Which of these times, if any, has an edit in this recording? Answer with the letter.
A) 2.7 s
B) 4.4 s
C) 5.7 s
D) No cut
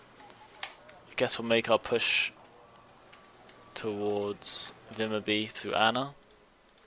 C